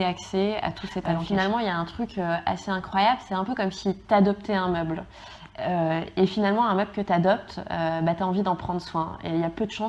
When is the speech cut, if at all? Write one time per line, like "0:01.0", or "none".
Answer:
0:01.1